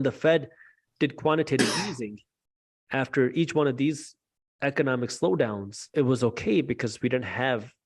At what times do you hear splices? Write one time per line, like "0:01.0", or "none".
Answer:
0:05.8